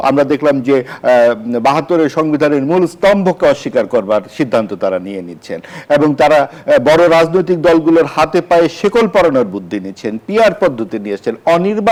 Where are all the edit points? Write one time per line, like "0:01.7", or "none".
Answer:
none